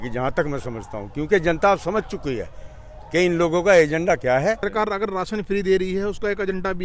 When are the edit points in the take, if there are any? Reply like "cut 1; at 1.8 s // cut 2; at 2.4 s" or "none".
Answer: cut 1; at 4.6 s